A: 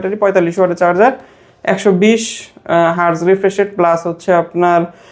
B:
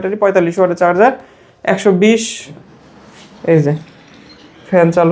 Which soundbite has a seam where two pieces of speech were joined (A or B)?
B